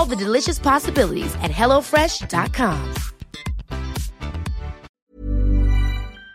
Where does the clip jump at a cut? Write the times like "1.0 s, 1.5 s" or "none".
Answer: 5.0 s

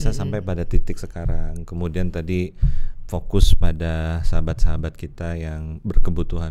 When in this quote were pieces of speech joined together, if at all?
none

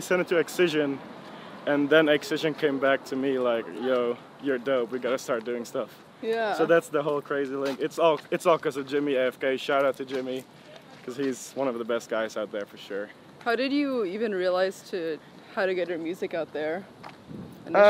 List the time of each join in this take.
none

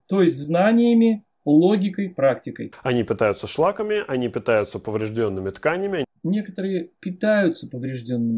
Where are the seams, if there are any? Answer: 2.6 s

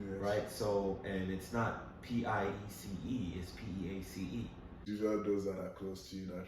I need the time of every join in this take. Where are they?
4.8 s

